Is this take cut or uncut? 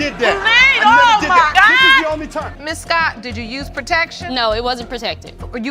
cut